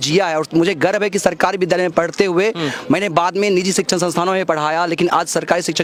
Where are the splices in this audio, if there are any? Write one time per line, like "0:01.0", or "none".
none